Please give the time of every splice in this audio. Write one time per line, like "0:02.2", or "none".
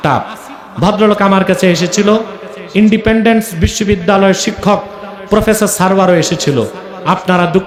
none